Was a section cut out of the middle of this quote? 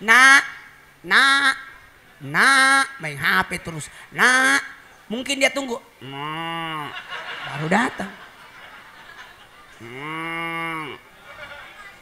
yes; 1 cut; at 9.6 s

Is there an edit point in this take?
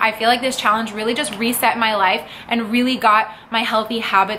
no; 0 cuts

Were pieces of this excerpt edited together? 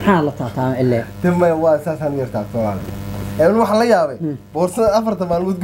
no; 0 cuts

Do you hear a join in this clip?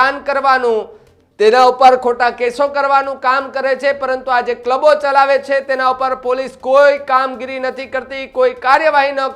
no; 0 cuts

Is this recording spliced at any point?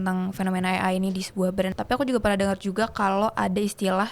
yes; 1 cut; at 1.7 s

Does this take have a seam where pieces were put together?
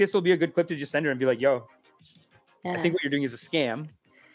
no; 0 cuts

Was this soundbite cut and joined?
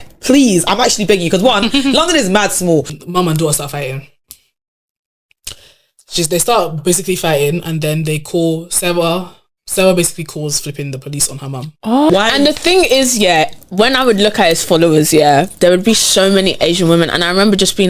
yes; 2 cuts; at 2.9 s, 12.1 s

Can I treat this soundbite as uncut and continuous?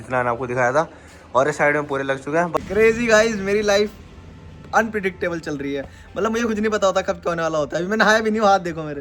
no; 1 cut; at 2.5 s

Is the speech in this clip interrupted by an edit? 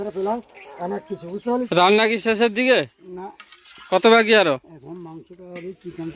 yes; 1 cut; at 1.5 s

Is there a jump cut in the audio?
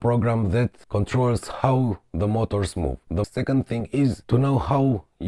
yes; 1 cut; at 3.1 s

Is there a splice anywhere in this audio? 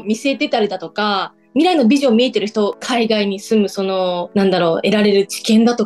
yes; 1 cut; at 2.8 s

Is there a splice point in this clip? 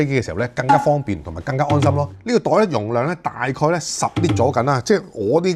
no; 0 cuts

